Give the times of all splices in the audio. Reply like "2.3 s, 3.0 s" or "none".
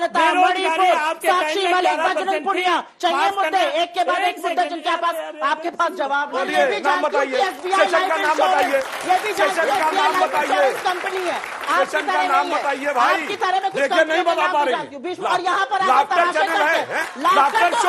6.4 s, 15.1 s